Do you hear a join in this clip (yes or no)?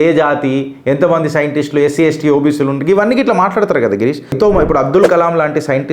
yes